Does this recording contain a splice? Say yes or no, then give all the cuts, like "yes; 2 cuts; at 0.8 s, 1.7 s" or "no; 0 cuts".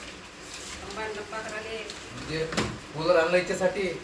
no; 0 cuts